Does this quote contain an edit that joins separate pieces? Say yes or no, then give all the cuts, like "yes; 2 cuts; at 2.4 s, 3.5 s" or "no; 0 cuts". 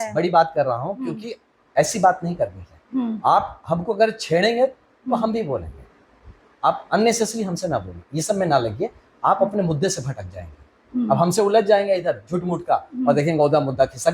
no; 0 cuts